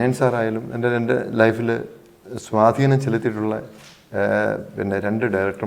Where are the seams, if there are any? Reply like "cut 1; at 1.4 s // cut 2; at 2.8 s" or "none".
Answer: none